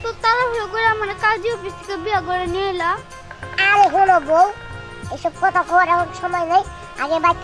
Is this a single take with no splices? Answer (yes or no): yes